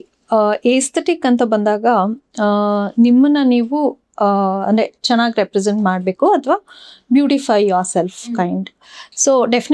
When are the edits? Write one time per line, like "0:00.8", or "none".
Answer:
none